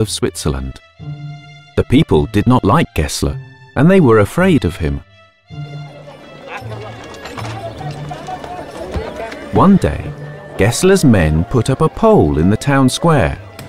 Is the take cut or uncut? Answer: uncut